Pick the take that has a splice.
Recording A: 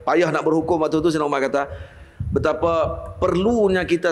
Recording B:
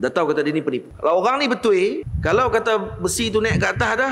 B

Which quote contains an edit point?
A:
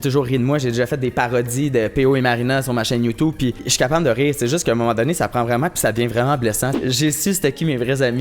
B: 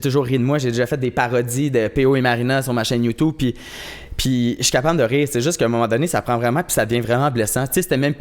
A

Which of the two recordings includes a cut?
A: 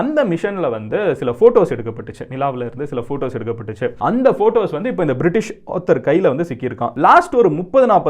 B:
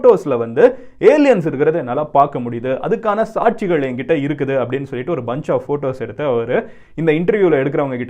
A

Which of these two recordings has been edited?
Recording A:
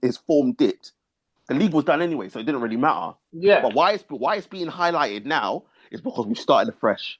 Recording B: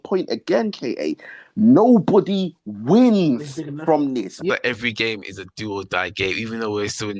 B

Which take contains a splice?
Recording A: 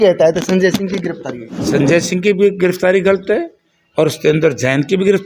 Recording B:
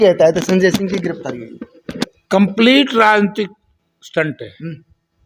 A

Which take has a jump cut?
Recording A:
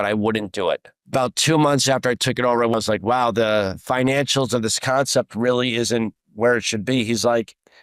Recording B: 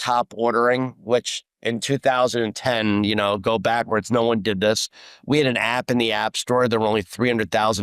A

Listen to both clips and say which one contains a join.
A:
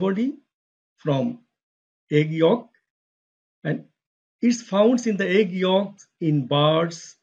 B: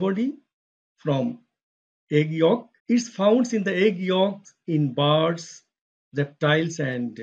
B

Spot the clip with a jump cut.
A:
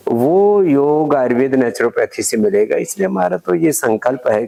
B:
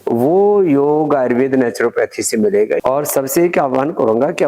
B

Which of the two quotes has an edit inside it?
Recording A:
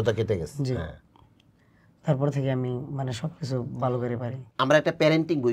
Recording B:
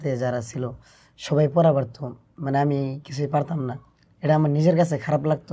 A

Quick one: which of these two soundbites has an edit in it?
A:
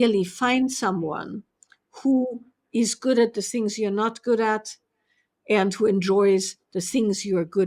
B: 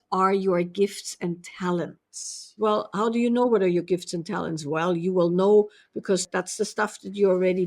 B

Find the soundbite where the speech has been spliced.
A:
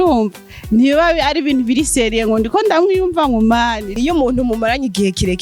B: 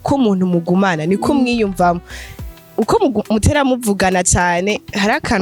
A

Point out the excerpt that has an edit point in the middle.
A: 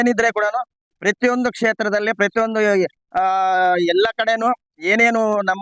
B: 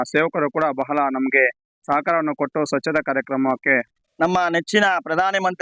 B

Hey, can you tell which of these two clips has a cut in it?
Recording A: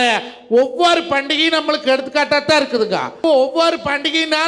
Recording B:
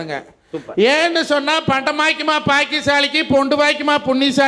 A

